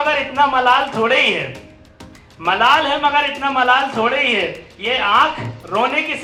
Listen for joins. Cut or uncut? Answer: uncut